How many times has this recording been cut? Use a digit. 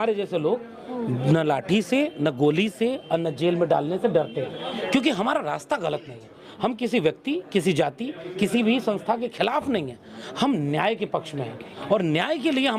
0